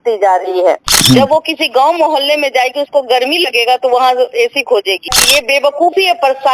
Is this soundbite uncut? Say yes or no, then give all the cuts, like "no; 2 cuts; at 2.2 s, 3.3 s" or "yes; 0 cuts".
no; 2 cuts; at 0.9 s, 5.1 s